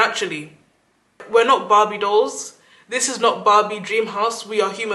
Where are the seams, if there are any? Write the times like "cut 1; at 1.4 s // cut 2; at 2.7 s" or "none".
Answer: cut 1; at 1.2 s

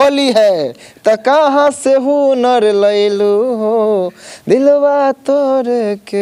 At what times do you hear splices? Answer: none

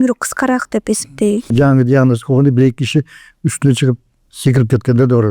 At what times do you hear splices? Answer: cut 1; at 1.5 s

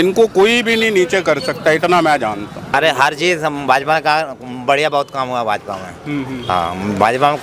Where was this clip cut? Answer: cut 1; at 2.7 s

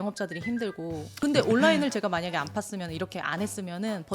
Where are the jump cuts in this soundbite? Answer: cut 1; at 1.1 s

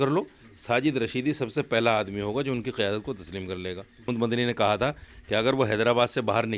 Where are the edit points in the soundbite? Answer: cut 1; at 4.1 s

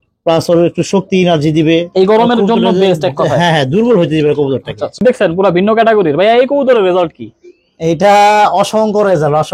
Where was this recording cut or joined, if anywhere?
cut 1; at 5.0 s

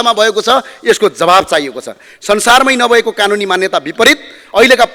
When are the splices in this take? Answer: none

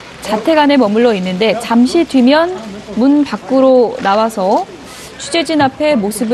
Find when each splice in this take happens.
cut 1; at 3.3 s

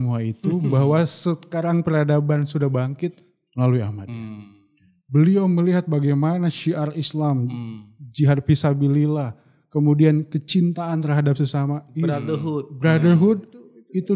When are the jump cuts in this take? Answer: none

